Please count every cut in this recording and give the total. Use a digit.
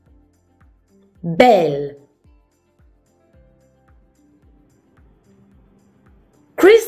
3